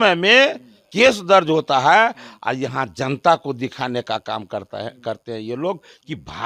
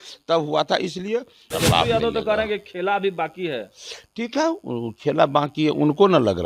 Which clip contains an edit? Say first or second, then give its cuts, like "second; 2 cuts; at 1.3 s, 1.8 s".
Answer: second; 1 cut; at 1.4 s